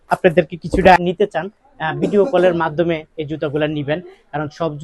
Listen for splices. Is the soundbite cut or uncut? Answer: cut